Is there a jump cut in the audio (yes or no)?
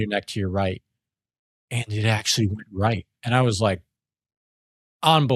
no